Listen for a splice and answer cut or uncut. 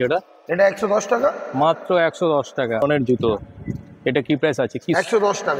cut